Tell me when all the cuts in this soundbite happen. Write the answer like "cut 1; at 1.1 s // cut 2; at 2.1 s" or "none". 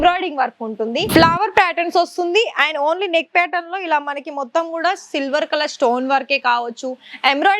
cut 1; at 1.1 s